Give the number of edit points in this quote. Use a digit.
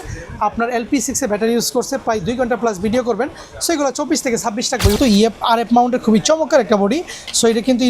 1